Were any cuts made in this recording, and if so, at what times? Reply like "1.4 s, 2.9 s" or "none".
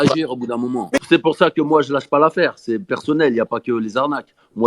1.0 s